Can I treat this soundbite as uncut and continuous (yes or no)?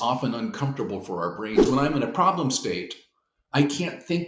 no